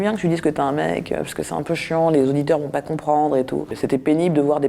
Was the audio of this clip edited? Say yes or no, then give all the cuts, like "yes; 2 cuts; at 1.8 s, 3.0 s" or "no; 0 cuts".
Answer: yes; 1 cut; at 3.7 s